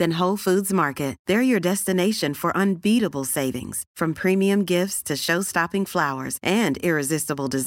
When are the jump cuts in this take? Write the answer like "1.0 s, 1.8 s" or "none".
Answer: none